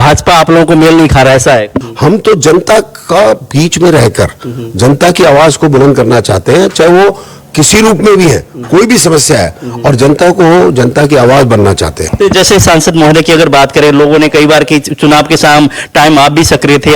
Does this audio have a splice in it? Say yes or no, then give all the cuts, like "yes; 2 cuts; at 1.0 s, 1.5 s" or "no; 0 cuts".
yes; 2 cuts; at 1.8 s, 12.0 s